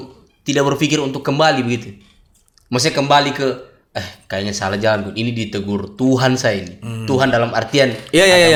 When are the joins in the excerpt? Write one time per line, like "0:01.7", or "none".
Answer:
none